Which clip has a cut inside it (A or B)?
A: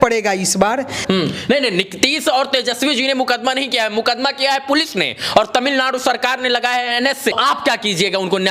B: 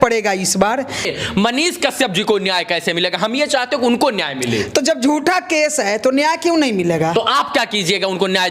A